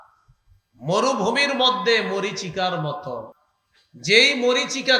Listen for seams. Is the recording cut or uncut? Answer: cut